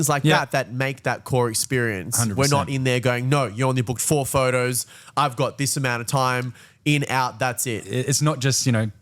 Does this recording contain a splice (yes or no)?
yes